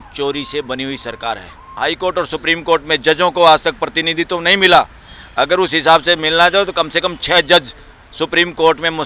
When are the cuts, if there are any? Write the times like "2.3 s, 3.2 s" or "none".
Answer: 1.6 s